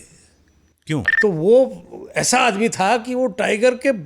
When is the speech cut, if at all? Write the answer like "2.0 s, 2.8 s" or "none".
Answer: 1.1 s